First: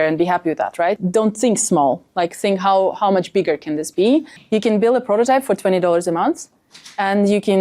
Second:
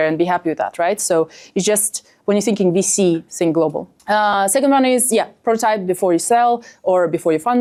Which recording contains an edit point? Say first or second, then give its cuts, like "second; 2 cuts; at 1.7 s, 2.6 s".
first; 2 cuts; at 1.0 s, 4.3 s